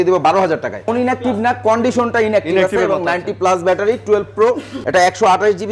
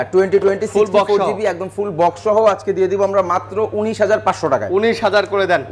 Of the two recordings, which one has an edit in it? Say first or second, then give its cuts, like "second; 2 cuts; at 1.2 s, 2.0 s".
first; 2 cuts; at 0.9 s, 4.7 s